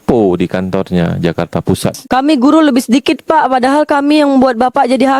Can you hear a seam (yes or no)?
yes